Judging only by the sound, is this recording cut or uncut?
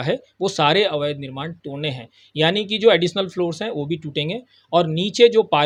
uncut